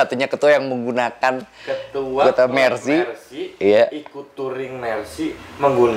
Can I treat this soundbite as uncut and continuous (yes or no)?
yes